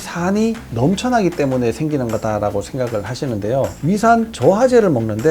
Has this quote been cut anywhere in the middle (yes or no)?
yes